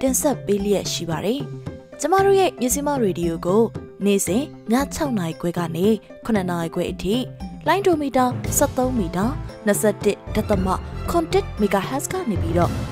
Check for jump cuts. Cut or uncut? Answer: uncut